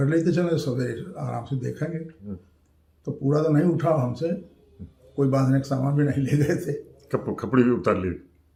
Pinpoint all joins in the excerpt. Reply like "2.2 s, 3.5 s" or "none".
none